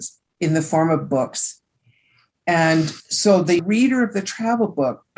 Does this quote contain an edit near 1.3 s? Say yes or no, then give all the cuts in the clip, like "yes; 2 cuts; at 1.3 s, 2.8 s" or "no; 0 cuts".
no; 1 cut; at 3.6 s